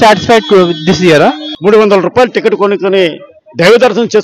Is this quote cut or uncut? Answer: cut